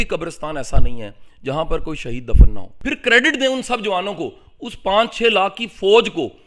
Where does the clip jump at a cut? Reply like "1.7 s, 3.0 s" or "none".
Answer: 2.7 s